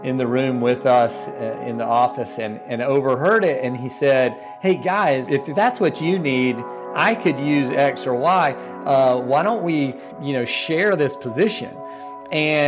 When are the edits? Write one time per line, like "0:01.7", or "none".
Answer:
0:05.2
0:10.1